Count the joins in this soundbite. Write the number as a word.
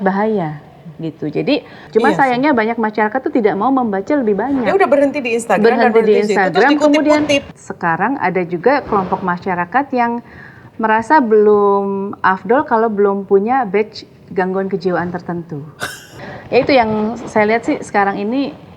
three